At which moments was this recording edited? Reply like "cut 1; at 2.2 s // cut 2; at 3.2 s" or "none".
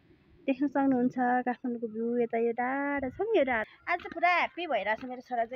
cut 1; at 3.7 s

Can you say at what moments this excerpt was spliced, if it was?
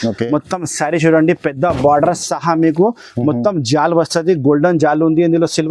none

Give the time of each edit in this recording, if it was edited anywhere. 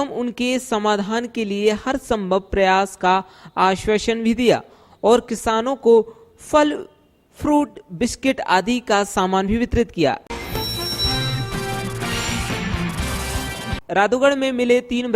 cut 1; at 10.2 s // cut 2; at 13.7 s

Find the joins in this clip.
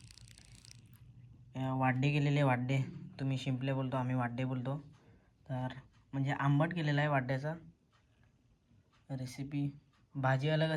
none

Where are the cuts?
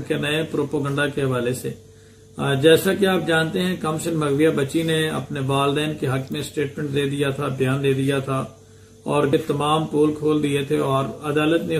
cut 1; at 9.3 s

